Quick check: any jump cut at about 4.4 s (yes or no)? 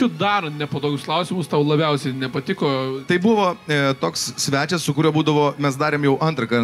no